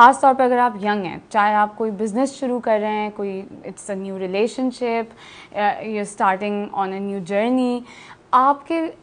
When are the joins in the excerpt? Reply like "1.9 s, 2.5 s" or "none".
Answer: none